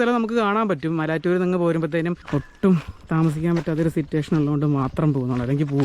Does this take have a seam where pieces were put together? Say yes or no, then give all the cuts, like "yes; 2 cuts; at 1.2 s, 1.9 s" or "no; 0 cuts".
yes; 1 cut; at 2.2 s